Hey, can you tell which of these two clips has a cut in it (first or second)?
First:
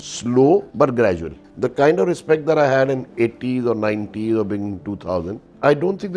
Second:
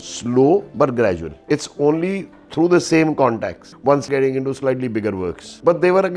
first